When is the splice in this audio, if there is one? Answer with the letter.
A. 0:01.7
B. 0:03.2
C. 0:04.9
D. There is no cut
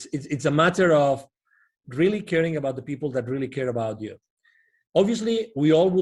D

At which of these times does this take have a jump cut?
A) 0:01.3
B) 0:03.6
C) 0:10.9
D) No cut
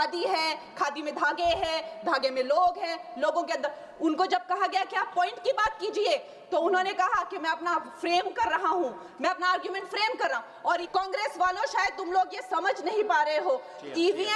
C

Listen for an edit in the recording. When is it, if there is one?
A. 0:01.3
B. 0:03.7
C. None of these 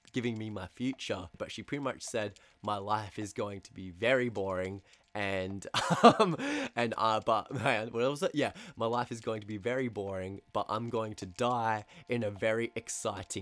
A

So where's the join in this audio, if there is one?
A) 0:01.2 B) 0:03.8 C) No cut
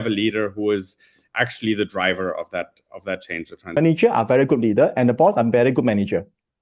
B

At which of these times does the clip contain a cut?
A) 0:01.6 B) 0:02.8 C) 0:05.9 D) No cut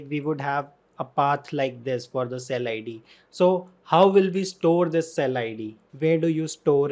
C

